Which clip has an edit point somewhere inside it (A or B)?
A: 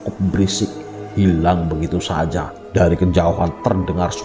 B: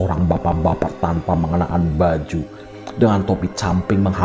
A